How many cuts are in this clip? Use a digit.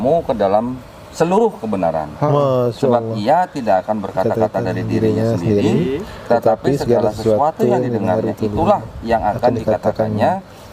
0